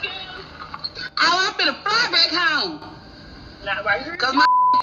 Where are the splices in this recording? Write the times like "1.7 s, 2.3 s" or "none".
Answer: 1.0 s